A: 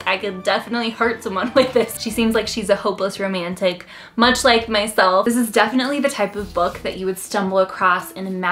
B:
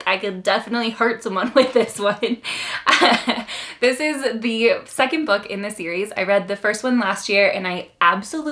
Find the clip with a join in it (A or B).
A